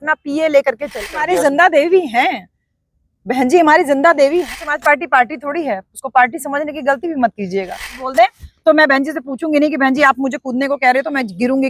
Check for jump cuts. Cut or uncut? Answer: cut